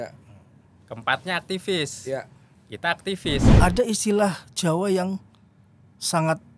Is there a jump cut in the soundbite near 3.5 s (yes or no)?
yes